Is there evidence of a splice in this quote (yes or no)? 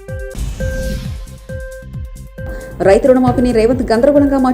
yes